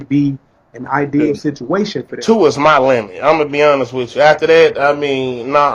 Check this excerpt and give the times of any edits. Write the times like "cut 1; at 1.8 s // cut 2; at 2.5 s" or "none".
cut 1; at 2.2 s